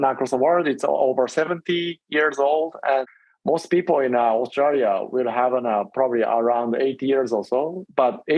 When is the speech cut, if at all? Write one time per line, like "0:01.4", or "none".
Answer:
0:03.0